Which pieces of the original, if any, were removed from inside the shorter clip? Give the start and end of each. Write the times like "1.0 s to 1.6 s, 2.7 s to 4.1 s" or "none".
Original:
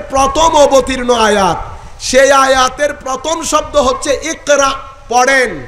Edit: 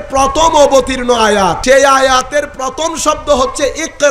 1.6 s to 2.0 s